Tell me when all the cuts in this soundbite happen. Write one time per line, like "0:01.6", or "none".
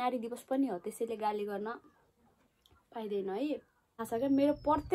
0:03.9